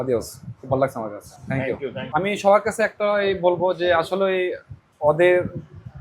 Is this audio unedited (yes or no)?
no